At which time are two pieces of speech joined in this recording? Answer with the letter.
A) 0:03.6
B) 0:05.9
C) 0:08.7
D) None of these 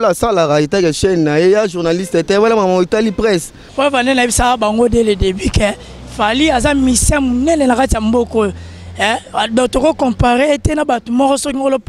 A